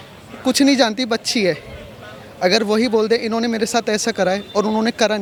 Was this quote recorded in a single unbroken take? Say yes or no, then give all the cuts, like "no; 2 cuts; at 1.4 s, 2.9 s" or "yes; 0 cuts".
yes; 0 cuts